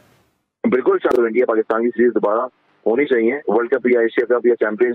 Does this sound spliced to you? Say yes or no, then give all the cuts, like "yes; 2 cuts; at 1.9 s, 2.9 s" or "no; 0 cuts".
yes; 1 cut; at 1.1 s